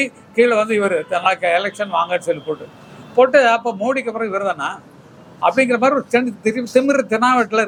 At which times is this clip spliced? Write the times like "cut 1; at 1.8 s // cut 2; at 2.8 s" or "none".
none

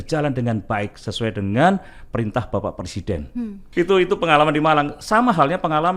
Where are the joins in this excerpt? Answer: none

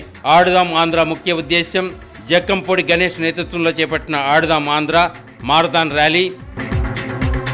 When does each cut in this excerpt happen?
none

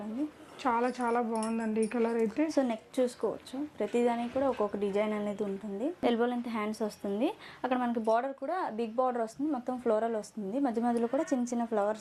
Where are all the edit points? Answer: cut 1; at 6.0 s

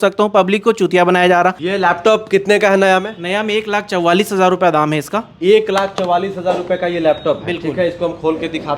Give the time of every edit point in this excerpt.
cut 1; at 1.6 s

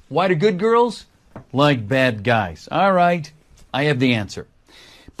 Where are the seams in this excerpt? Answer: cut 1; at 1.0 s

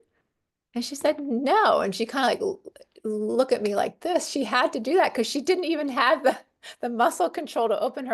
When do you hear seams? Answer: none

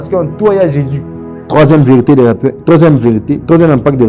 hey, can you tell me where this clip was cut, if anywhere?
none

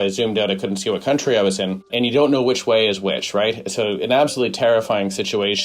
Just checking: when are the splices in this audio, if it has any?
cut 1; at 1.9 s

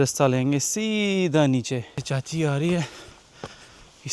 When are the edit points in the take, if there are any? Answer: cut 1; at 2.1 s

